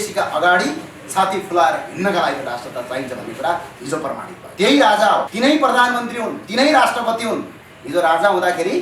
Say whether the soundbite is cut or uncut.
cut